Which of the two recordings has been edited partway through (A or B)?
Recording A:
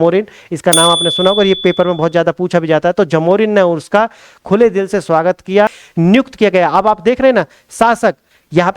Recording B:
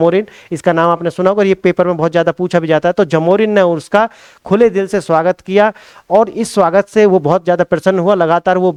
A